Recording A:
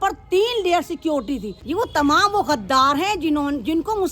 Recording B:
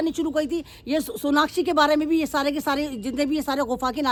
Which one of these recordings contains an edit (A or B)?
A